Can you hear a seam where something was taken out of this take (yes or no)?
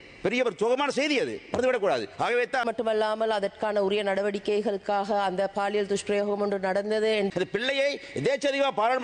yes